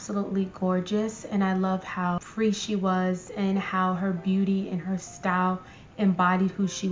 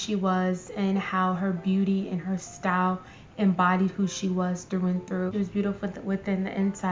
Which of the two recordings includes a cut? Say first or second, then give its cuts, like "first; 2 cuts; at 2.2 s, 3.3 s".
second; 1 cut; at 5.3 s